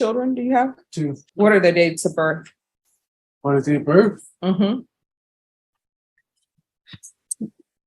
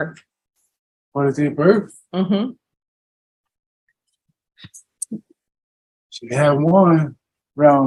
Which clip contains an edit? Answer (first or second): first